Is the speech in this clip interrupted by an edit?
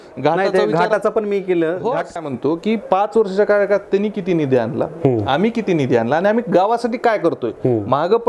yes; 1 cut; at 2.2 s

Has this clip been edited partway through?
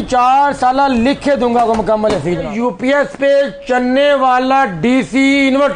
yes; 1 cut; at 2.5 s

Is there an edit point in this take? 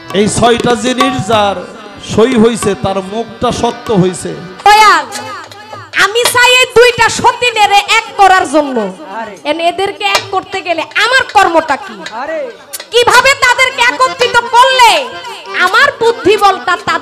yes; 1 cut; at 4.6 s

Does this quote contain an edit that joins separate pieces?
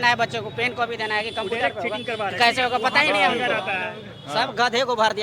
no; 0 cuts

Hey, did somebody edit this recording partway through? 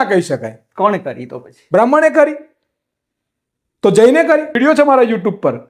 yes; 1 cut; at 4.5 s

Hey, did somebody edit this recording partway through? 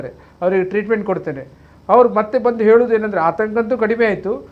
no; 0 cuts

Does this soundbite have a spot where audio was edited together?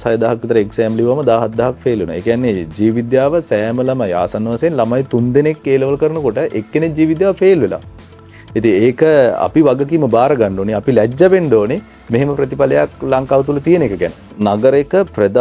no; 0 cuts

